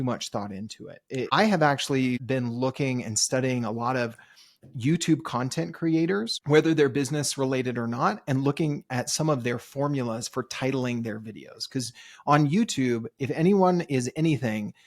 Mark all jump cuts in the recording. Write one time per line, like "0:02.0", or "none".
0:01.3
0:02.2
0:06.3